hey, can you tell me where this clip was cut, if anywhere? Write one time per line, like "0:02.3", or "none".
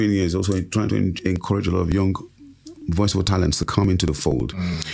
none